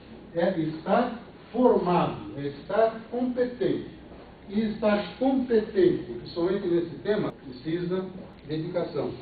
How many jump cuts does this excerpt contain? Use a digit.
2